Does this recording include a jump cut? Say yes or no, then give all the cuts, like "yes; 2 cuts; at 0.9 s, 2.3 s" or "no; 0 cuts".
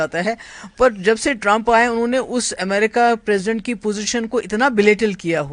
no; 0 cuts